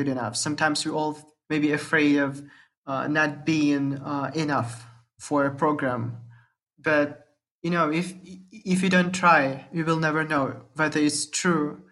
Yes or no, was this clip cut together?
yes